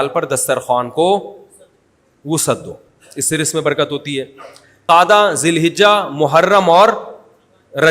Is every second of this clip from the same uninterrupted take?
no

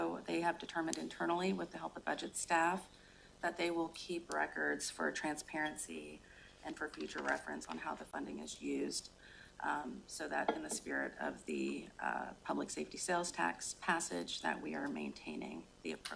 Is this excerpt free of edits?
yes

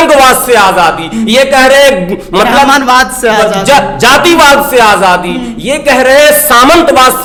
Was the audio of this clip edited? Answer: no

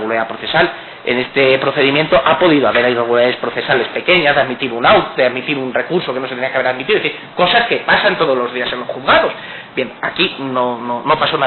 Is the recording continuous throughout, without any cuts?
no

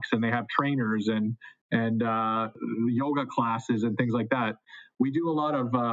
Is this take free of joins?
no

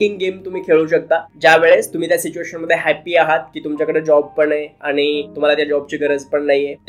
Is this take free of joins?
yes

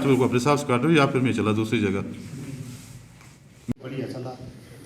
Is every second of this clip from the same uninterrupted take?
no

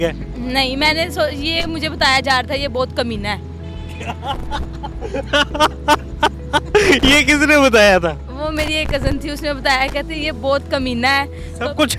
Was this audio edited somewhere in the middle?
no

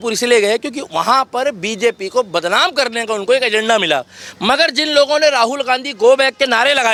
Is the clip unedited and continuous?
yes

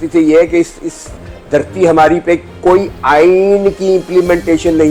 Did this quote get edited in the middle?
no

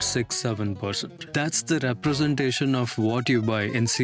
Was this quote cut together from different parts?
yes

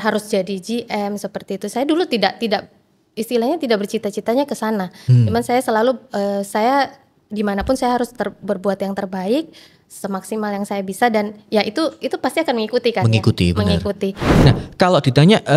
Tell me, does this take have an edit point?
yes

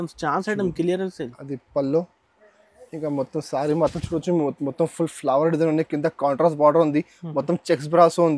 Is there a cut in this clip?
no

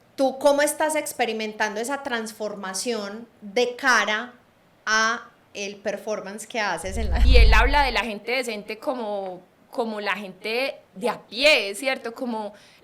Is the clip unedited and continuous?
no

